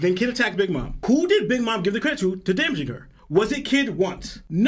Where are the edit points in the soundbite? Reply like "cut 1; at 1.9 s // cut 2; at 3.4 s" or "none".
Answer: cut 1; at 0.9 s